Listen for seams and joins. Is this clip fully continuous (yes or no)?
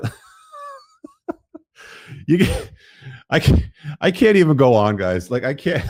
yes